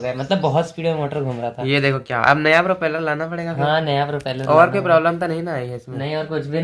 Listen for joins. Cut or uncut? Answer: uncut